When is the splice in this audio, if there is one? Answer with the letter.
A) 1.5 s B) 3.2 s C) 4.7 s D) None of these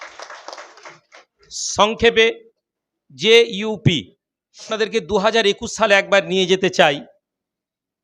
C